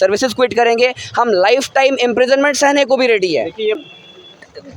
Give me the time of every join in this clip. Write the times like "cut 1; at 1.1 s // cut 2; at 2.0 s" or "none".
cut 1; at 3.8 s